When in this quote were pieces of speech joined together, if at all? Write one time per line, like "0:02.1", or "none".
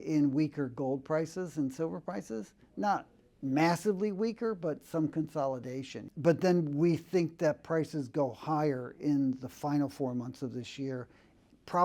0:06.0